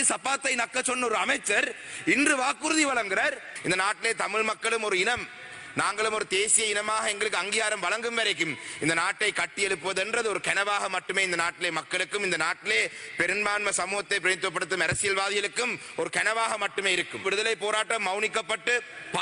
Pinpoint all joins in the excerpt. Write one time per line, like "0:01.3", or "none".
0:03.5
0:17.2